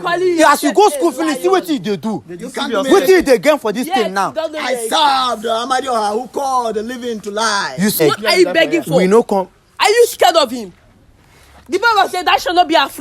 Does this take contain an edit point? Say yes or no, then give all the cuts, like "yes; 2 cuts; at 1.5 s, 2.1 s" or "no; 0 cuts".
yes; 1 cut; at 8.0 s